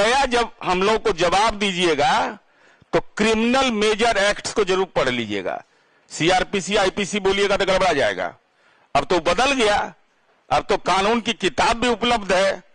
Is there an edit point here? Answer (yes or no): no